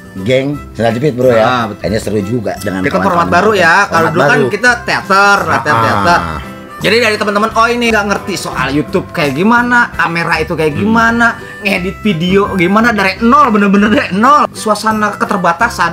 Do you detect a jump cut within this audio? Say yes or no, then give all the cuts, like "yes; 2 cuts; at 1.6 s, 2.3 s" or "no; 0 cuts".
yes; 4 cuts; at 1.7 s, 7.9 s, 9.9 s, 14.5 s